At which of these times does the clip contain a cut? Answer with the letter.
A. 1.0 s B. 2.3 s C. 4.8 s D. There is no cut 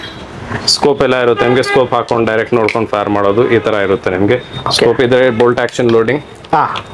D